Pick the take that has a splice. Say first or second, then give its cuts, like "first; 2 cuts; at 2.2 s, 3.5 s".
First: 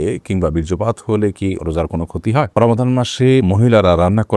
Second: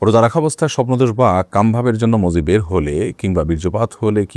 first; 2 cuts; at 2.5 s, 3.4 s